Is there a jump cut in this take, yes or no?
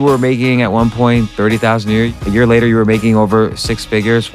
yes